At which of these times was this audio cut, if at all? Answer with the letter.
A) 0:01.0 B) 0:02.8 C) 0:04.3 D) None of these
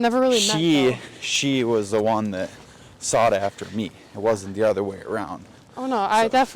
D